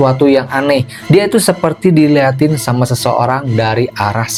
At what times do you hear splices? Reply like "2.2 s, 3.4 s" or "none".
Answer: none